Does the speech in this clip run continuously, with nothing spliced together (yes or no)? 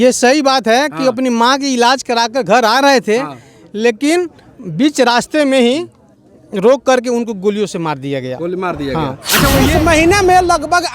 no